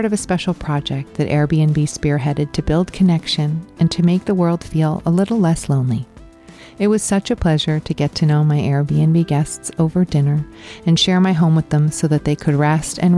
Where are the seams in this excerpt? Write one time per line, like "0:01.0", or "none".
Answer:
none